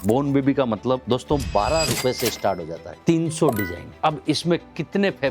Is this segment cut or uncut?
cut